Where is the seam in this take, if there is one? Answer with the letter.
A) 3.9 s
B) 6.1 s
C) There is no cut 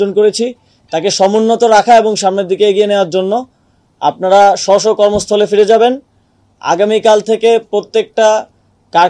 C